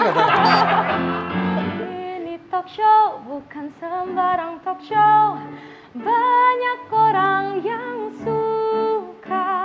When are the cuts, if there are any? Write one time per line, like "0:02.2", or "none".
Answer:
0:01.9